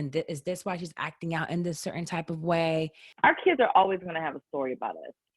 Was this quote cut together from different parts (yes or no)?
yes